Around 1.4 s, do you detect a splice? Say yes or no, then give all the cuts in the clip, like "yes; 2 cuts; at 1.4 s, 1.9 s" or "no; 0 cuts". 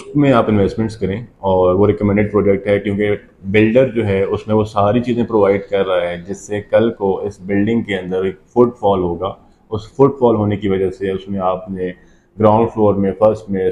no; 0 cuts